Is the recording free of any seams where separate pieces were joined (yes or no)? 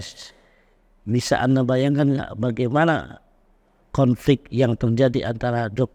yes